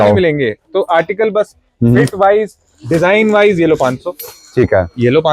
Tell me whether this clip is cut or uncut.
uncut